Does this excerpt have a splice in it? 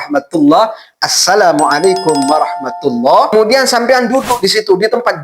yes; 1 cut; at 3.3 s

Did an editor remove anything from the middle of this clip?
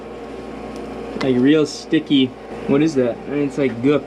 yes; 1 cut; at 2.5 s

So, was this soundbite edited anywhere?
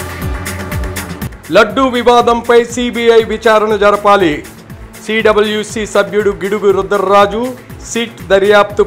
no; 0 cuts

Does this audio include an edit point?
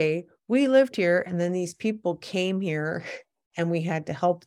no; 0 cuts

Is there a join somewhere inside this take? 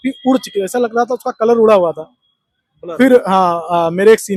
no; 0 cuts

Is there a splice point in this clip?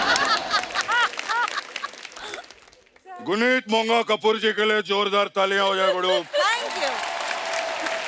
no; 0 cuts

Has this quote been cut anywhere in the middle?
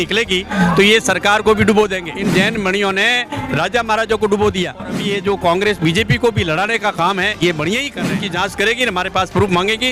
yes; 3 cuts; at 2.1 s, 5.0 s, 8.2 s

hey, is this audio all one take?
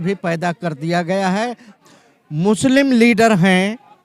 no; 1 cut; at 1.8 s

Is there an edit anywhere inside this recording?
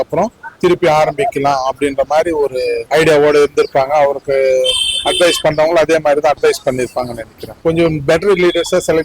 yes; 1 cut; at 7.6 s

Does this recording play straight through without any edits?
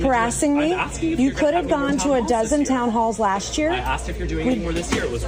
yes; 0 cuts

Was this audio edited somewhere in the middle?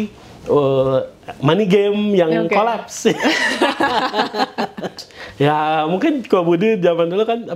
yes; 1 cut; at 5.0 s

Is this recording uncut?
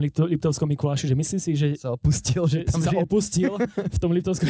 yes; 0 cuts

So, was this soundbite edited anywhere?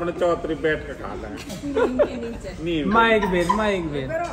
no; 0 cuts

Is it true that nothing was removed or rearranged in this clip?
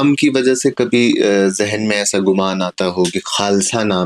yes; 0 cuts

